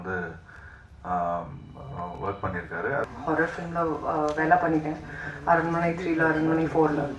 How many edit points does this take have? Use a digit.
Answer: 1